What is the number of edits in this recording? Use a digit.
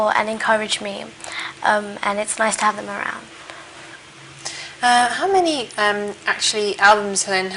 1